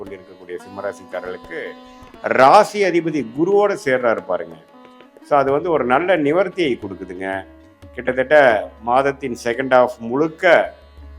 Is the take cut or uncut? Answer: uncut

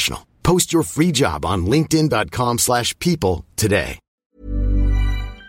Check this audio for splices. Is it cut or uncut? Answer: cut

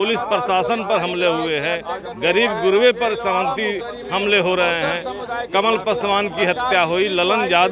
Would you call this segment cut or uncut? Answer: uncut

